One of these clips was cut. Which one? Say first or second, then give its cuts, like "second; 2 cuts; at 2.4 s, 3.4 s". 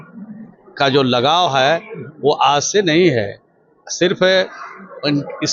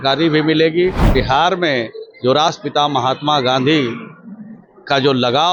second; 1 cut; at 1.1 s